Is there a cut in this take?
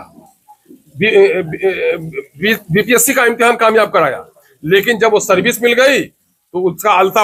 no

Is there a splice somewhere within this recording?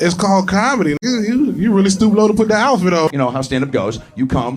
yes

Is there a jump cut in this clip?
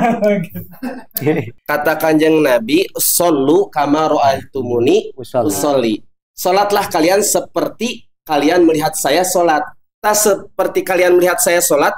yes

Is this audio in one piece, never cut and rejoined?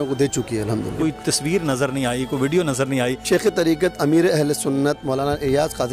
no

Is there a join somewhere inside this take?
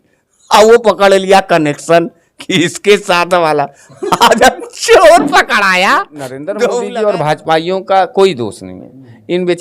yes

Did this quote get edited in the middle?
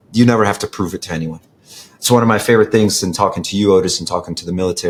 no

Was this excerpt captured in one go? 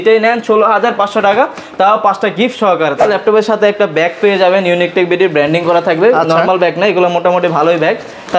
no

